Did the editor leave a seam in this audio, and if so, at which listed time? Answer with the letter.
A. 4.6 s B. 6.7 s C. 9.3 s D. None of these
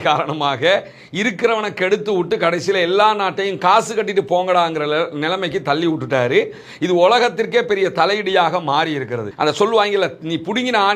C